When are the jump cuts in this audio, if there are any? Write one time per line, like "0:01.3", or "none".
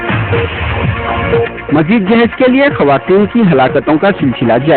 0:01.3